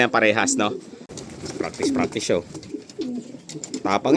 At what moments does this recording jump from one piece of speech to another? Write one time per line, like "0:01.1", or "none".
0:01.2